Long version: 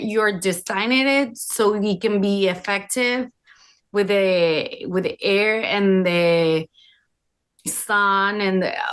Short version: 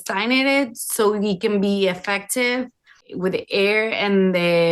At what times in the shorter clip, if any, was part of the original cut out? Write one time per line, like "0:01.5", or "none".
0:03.0